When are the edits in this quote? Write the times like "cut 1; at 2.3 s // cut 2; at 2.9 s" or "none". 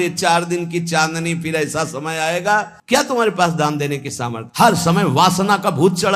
cut 1; at 2.8 s